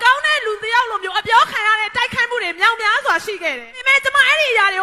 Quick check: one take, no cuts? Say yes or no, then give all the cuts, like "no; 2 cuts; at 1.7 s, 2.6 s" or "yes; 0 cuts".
yes; 0 cuts